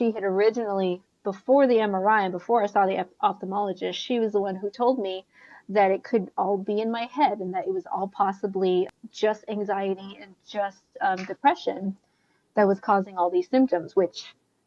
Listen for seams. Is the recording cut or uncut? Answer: cut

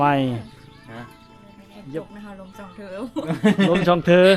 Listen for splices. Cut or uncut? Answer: cut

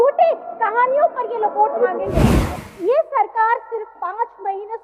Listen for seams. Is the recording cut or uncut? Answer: cut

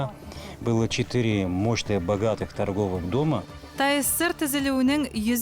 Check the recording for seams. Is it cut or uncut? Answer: cut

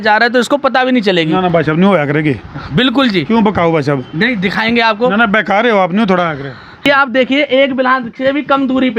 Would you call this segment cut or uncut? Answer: cut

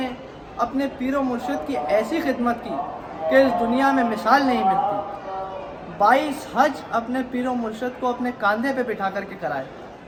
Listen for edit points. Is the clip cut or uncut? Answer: uncut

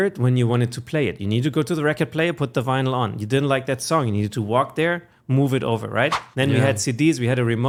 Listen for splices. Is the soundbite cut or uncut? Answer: uncut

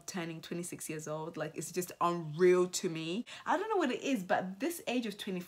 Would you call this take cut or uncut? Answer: cut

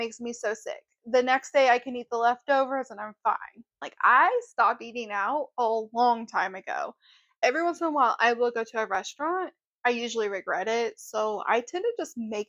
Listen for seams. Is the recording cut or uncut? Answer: cut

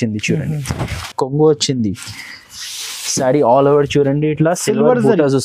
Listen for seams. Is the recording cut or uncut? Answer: cut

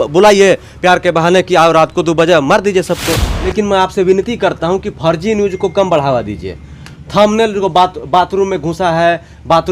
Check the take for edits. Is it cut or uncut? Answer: cut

